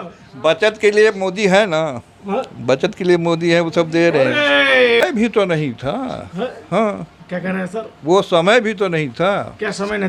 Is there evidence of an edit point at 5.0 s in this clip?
yes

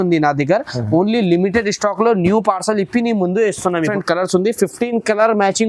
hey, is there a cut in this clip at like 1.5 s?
no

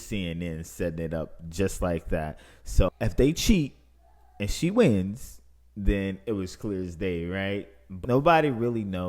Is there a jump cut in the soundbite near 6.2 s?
no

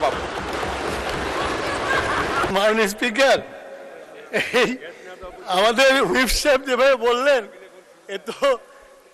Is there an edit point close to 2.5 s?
yes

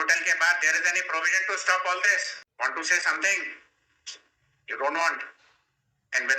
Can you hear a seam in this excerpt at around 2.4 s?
yes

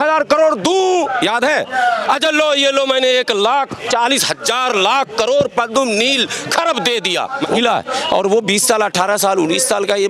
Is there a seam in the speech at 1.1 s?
no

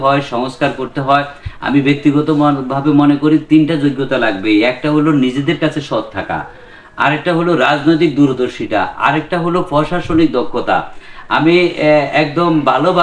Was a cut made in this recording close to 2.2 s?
no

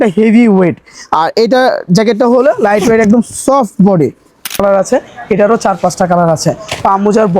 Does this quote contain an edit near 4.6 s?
yes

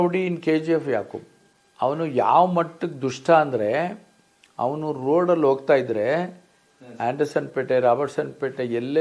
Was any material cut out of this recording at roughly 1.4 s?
yes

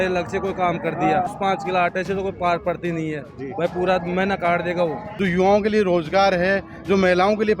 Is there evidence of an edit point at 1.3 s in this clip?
yes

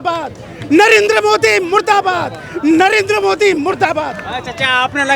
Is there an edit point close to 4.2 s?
no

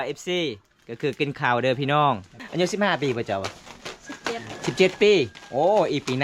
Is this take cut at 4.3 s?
no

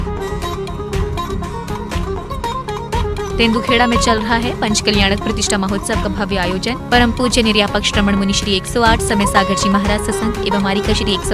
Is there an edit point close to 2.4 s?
no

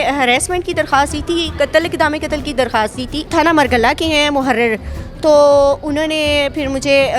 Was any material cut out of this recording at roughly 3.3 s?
yes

